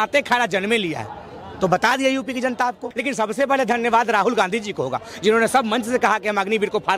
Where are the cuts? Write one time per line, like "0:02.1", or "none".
0:02.8